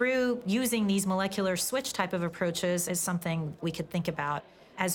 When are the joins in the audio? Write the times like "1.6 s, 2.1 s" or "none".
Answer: 3.6 s